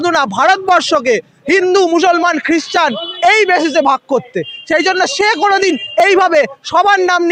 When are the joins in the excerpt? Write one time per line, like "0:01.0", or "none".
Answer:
none